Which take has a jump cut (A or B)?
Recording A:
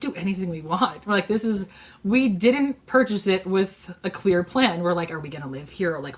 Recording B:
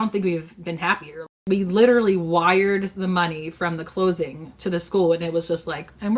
B